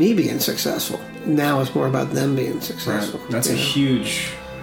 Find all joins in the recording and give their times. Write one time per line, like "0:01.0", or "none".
0:01.0